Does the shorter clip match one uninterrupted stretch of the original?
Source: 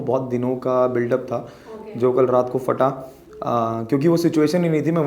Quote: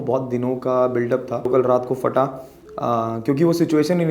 no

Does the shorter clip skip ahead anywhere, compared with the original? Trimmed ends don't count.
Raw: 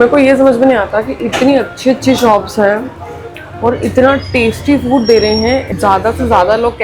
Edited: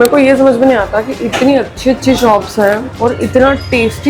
yes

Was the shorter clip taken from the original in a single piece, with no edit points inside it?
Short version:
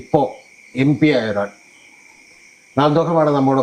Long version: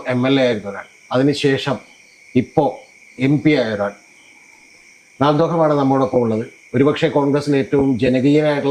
yes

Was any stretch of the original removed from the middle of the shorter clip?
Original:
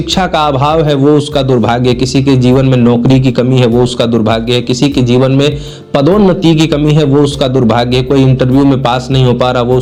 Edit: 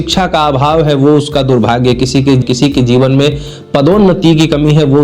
yes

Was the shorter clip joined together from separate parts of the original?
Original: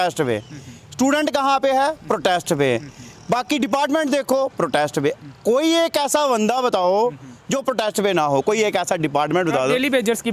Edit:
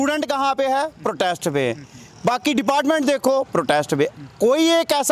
no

